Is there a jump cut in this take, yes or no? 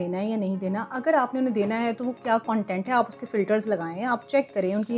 no